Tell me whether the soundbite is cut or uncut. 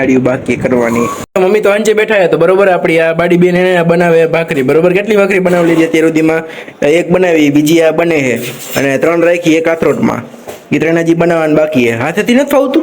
cut